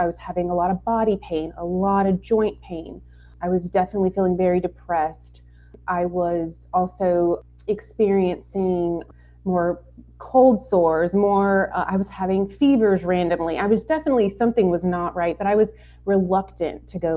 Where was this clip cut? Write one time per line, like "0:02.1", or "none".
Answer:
0:03.3
0:05.8
0:07.5
0:09.1